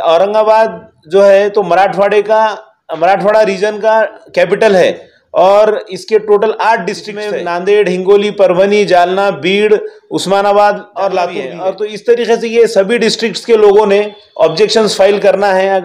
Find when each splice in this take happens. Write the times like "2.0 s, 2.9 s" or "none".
7.1 s, 11.5 s